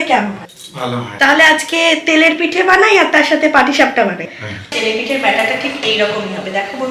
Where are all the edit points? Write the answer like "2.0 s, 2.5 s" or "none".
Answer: 0.9 s, 4.4 s